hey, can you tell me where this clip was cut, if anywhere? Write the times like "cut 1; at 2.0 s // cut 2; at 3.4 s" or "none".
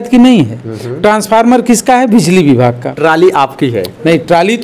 cut 1; at 2.9 s